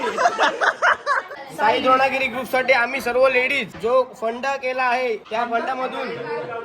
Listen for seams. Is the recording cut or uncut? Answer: cut